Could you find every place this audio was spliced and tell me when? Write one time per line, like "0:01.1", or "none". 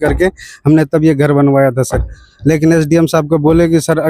none